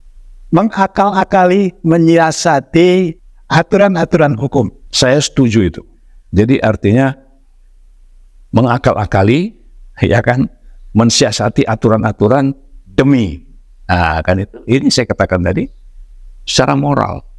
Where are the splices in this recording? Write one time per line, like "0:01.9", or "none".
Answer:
0:03.2
0:04.8